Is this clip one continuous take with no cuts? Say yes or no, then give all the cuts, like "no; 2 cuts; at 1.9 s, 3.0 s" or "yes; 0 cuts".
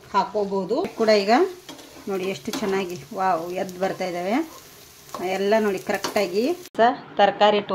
no; 2 cuts; at 0.9 s, 6.7 s